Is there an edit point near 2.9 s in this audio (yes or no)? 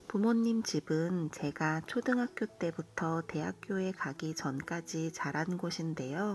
no